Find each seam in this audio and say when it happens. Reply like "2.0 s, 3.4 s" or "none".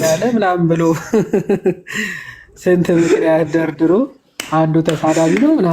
none

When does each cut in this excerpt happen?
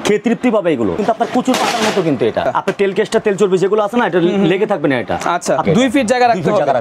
1.0 s, 2.5 s, 5.6 s

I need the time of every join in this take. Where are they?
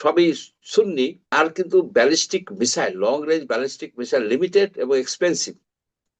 1.3 s

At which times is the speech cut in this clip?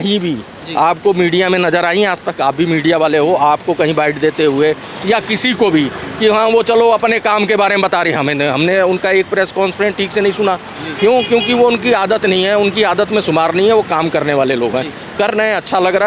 none

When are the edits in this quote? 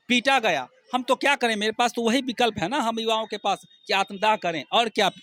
none

